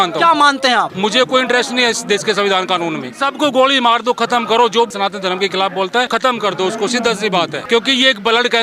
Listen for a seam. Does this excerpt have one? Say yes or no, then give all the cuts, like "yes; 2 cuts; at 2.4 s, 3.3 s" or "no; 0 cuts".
yes; 5 cuts; at 0.9 s, 3.1 s, 4.9 s, 6.1 s, 7.6 s